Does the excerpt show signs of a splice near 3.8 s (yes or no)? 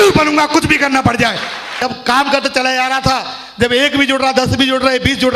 no